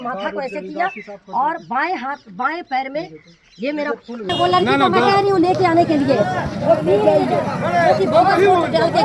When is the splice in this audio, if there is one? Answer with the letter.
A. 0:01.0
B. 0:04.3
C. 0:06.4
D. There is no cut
B